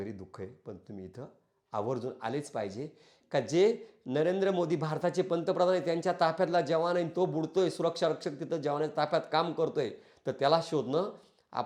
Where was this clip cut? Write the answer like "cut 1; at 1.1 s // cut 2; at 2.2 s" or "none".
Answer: none